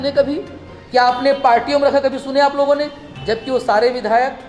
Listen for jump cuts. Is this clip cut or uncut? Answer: uncut